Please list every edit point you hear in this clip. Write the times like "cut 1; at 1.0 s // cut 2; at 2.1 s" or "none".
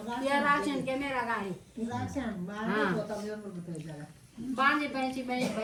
none